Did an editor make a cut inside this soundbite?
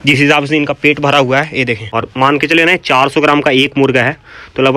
yes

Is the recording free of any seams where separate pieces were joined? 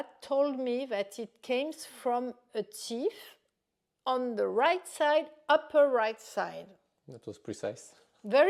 yes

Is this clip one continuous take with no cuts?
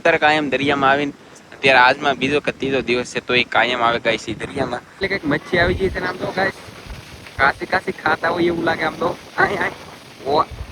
no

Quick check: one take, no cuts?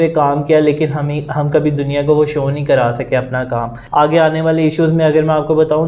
no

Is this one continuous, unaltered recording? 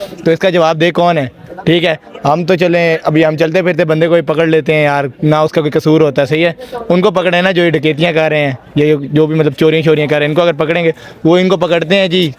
yes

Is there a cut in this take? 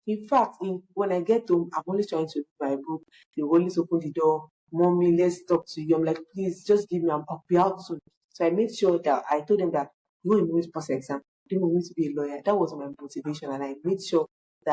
no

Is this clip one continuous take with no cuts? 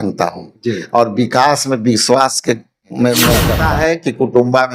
no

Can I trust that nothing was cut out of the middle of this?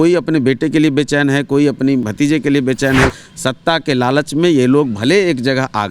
no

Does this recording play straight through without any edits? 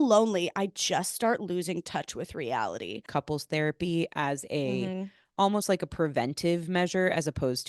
no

